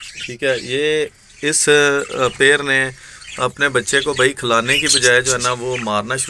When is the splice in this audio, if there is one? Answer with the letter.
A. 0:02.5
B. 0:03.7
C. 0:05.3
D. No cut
D